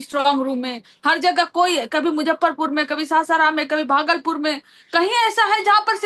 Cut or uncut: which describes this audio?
uncut